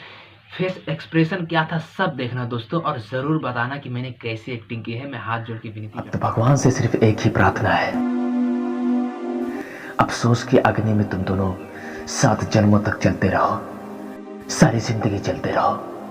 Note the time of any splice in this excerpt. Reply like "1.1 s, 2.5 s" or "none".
6.1 s